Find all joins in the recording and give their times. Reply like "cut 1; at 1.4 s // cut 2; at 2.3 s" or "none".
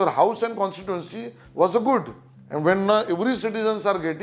none